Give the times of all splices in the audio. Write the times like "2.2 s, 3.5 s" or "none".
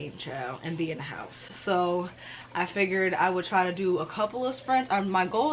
none